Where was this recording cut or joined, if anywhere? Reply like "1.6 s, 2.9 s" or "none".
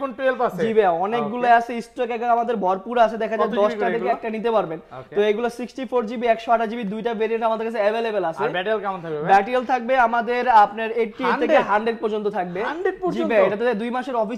none